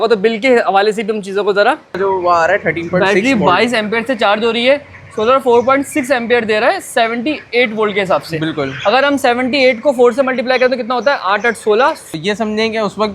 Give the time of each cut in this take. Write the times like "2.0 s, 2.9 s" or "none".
2.0 s, 12.1 s